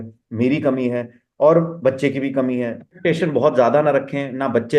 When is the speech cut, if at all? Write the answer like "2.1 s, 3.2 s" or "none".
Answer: 3.0 s